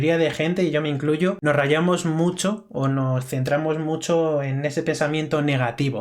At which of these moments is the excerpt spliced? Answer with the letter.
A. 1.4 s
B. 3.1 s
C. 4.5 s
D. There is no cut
A